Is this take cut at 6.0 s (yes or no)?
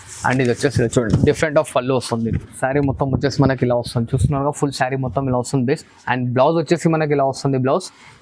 no